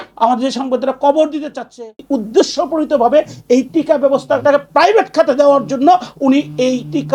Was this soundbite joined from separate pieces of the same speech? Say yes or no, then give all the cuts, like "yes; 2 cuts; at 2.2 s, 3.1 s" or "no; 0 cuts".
yes; 1 cut; at 1.8 s